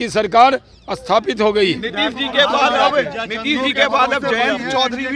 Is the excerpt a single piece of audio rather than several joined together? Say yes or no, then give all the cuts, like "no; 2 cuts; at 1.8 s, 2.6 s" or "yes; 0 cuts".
yes; 0 cuts